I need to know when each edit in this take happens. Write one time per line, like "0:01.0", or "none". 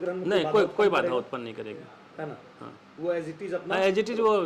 none